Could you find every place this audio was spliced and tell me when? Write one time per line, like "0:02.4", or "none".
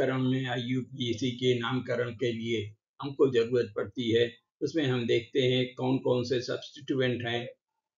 none